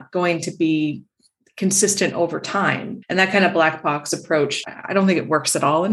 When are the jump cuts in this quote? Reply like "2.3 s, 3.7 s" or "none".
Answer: 2.9 s, 4.7 s